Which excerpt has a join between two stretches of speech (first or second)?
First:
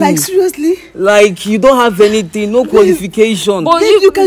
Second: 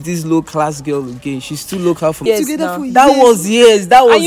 second